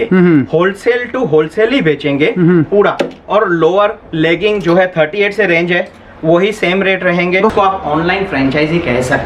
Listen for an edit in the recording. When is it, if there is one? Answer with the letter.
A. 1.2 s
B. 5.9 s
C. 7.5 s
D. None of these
C